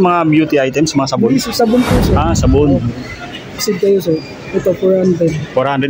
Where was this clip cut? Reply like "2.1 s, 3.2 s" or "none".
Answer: 3.6 s